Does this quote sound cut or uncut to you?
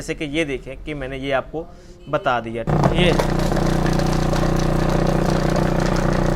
cut